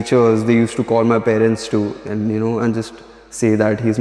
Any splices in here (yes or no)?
no